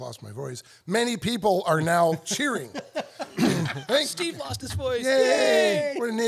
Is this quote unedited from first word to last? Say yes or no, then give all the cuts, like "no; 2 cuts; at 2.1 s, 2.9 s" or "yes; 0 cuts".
yes; 0 cuts